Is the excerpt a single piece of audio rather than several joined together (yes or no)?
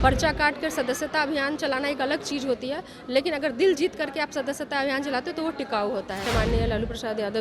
no